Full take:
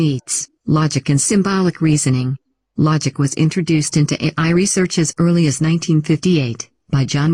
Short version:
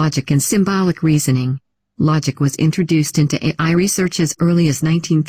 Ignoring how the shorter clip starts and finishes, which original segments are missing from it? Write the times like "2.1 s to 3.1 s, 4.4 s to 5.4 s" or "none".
none

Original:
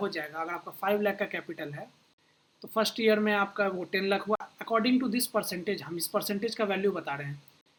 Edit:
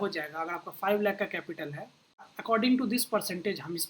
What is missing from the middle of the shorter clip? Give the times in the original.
2.3 s to 4.5 s

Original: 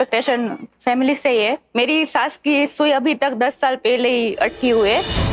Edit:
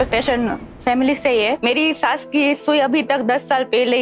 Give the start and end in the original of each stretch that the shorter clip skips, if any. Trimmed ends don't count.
1.6 s to 1.7 s

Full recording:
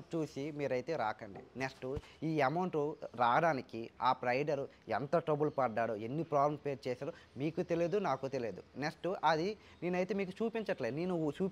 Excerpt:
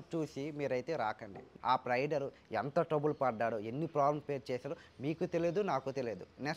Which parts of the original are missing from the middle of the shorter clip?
1.4 s to 3.8 s

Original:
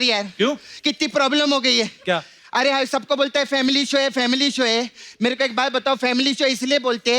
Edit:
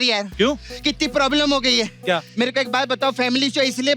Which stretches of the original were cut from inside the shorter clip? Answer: 2.3 s to 5.1 s

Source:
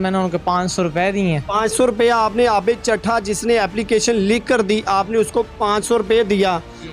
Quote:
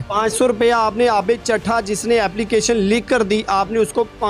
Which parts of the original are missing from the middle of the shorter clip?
none

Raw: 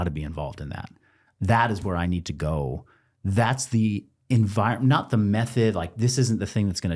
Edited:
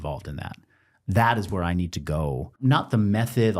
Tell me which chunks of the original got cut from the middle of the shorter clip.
2.9 s to 4.8 s

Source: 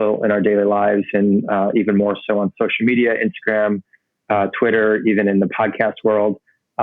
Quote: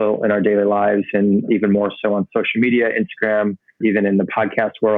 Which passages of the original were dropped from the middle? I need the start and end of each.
1.5 s to 1.7 s, 4.0 s to 5.0 s

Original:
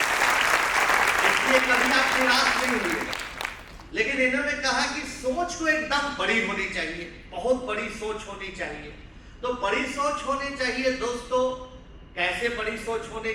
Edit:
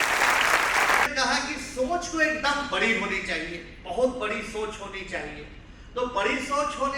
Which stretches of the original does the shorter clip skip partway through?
1.1 s to 4.6 s

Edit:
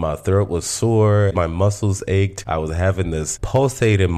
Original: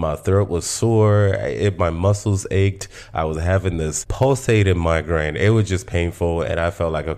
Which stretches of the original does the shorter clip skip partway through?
1.3 s to 1.7 s, 2.8 s to 3.1 s

